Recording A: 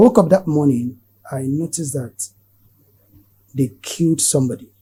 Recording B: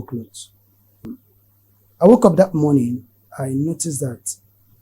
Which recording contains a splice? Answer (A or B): B